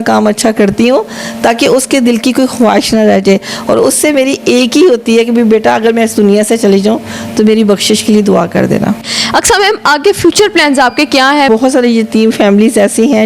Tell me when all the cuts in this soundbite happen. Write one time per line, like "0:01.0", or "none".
0:09.1
0:11.5